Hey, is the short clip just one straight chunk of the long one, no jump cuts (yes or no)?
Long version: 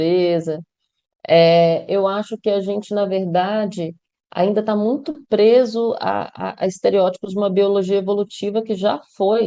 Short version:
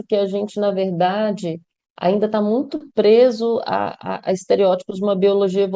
yes